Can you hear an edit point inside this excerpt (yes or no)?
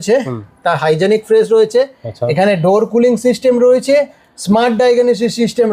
no